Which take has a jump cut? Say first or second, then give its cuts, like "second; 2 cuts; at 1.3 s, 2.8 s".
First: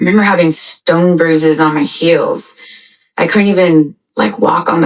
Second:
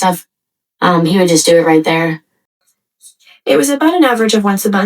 second; 1 cut; at 2.8 s